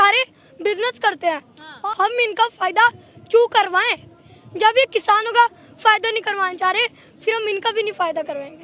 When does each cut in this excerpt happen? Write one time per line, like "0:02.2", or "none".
0:01.7

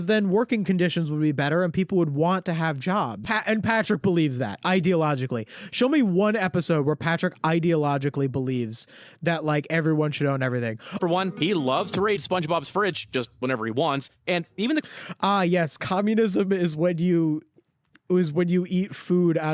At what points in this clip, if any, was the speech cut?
0:03.3
0:10.9

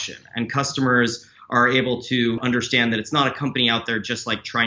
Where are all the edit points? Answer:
0:02.4

